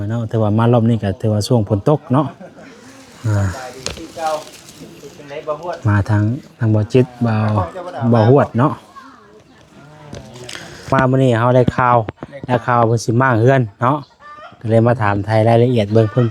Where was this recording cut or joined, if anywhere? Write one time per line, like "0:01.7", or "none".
0:10.9